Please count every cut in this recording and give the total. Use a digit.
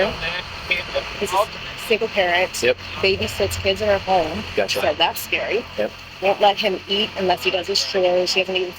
2